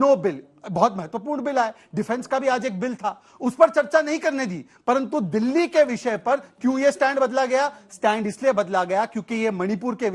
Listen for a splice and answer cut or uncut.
uncut